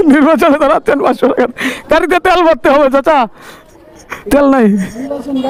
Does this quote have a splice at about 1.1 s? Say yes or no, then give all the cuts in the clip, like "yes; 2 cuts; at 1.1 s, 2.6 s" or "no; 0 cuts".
no; 0 cuts